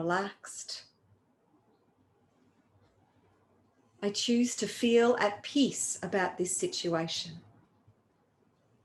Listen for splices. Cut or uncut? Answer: uncut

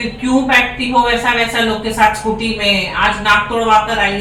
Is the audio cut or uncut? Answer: uncut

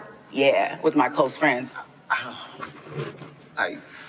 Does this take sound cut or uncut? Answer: cut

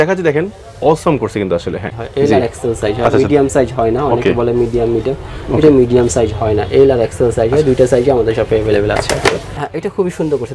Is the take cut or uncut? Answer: cut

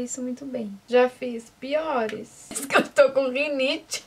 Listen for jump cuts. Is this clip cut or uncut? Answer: uncut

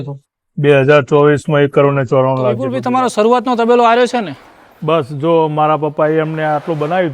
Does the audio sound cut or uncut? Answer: cut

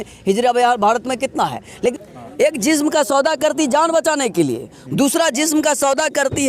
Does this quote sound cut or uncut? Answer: cut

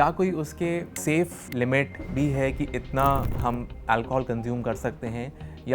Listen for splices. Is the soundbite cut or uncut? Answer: cut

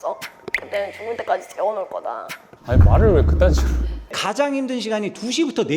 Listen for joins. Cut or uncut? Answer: cut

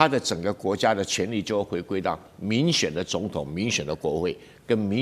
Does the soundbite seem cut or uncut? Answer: uncut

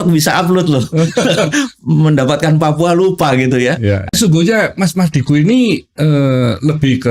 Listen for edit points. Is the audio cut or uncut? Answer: cut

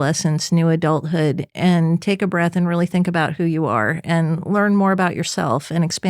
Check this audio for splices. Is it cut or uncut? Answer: cut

